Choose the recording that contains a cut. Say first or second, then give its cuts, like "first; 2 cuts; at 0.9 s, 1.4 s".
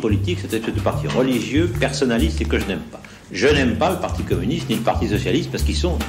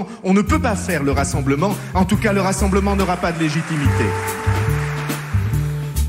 second; 1 cut; at 4.1 s